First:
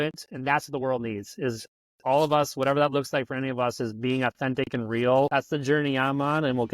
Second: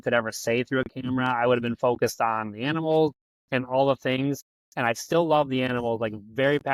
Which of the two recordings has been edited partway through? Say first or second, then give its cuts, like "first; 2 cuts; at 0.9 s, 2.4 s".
first; 1 cut; at 5.3 s